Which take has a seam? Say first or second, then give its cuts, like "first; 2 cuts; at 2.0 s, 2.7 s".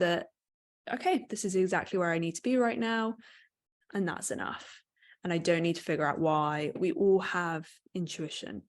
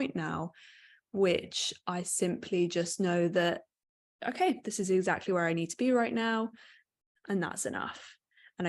first; 1 cut; at 6.8 s